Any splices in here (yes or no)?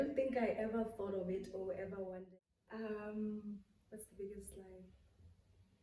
yes